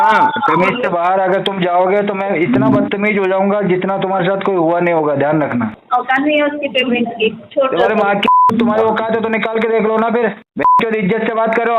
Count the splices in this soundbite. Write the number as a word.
one